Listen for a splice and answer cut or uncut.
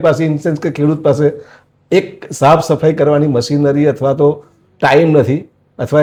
uncut